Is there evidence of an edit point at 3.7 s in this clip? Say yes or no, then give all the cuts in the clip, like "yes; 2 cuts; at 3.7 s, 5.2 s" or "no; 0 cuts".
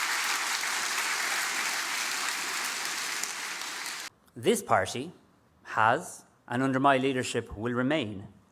yes; 1 cut; at 3.7 s